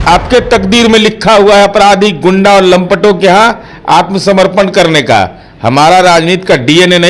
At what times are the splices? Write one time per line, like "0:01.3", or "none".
none